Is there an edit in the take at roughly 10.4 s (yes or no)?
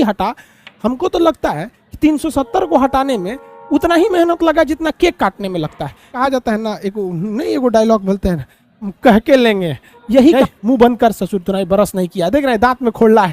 yes